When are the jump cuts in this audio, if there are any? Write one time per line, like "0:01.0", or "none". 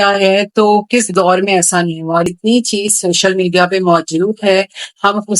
0:02.3